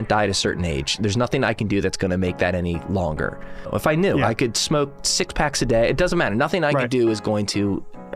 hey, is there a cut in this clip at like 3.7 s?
yes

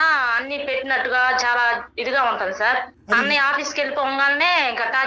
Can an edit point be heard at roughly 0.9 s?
no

